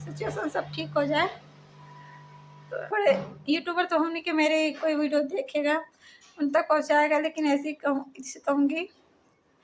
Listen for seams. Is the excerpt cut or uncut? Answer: cut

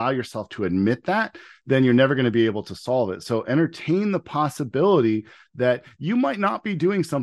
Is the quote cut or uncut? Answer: uncut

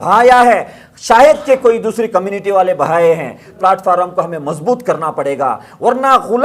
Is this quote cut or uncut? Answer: cut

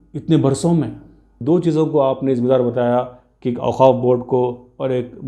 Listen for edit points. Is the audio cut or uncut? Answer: cut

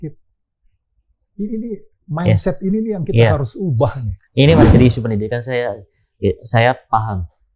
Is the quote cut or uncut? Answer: cut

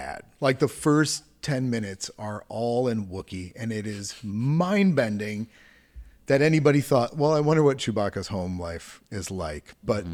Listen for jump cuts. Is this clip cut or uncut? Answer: uncut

